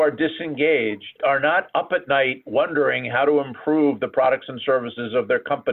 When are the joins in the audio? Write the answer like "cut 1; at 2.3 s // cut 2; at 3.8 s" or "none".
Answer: cut 1; at 1.2 s